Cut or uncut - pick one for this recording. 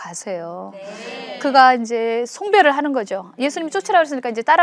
uncut